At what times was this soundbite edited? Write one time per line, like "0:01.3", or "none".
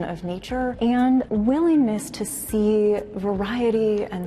0:00.8
0:01.3